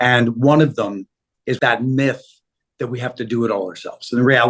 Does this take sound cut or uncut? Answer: cut